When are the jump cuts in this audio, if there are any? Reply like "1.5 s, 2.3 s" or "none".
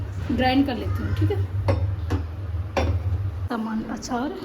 3.3 s